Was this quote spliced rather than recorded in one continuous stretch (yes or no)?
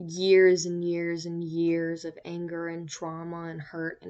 no